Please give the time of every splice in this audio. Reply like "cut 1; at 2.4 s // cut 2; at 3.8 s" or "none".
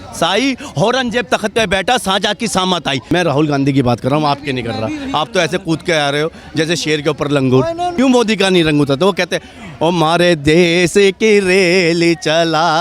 cut 1; at 3.1 s // cut 2; at 7.9 s